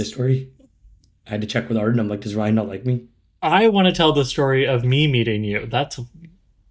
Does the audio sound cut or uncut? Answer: uncut